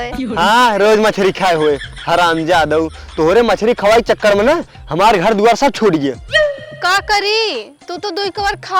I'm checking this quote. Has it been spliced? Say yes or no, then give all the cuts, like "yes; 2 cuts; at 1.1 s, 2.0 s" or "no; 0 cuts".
no; 0 cuts